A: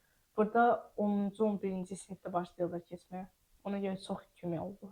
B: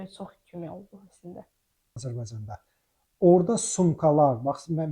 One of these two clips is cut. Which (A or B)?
B